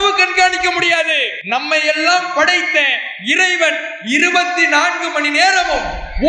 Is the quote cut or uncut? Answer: cut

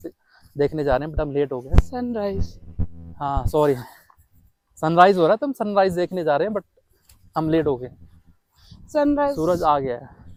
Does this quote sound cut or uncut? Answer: uncut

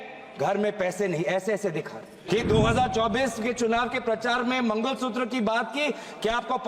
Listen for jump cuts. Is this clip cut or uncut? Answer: cut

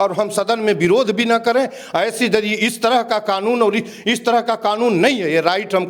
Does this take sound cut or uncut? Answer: uncut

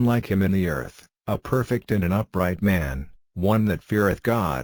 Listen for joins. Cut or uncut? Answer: uncut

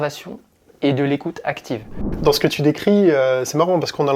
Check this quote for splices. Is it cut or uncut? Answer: cut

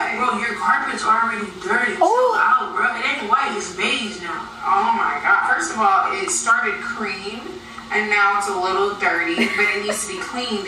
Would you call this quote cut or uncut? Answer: uncut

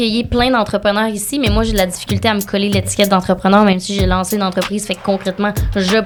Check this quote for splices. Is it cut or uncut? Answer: uncut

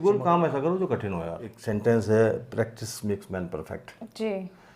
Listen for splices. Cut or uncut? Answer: cut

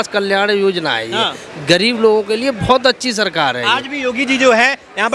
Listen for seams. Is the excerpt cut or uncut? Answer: uncut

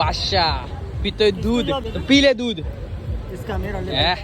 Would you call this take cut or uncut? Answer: cut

